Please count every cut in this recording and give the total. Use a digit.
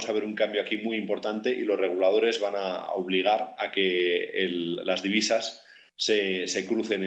0